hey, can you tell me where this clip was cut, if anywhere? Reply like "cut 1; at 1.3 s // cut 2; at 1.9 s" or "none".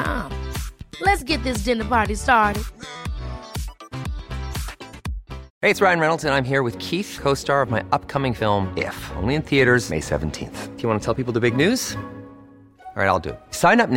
cut 1; at 5.5 s